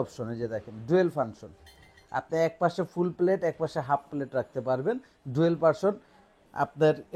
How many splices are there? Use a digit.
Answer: 0